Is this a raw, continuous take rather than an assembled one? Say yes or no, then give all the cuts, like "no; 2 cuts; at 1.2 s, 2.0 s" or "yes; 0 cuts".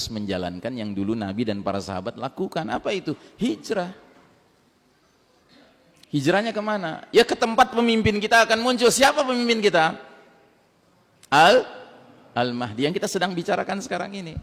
yes; 0 cuts